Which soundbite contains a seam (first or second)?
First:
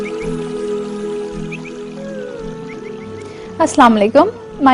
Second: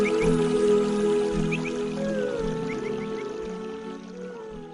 first